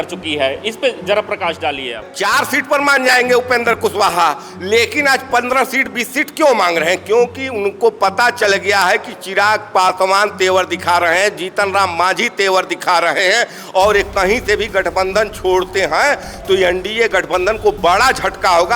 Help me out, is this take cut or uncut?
cut